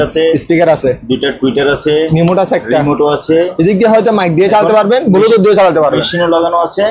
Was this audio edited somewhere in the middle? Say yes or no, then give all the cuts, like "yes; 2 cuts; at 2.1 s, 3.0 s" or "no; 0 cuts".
no; 0 cuts